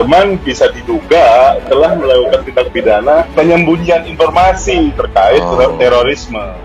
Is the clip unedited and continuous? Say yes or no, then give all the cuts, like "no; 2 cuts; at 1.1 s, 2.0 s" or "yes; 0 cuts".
no; 1 cut; at 3.3 s